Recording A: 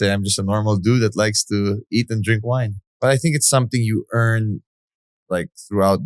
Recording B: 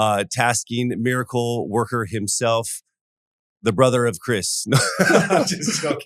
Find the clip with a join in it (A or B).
A